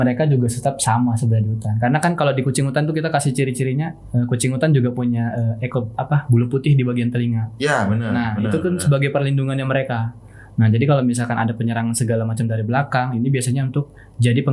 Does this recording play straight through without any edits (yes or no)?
yes